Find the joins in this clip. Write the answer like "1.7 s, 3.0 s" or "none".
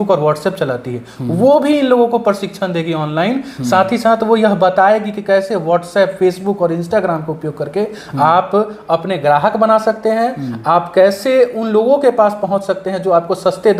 none